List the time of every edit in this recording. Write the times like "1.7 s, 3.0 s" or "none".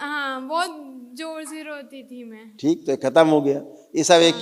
none